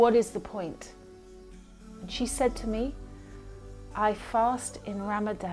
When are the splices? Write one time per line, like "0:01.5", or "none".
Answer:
none